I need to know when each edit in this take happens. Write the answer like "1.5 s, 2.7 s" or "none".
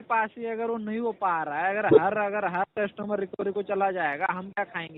none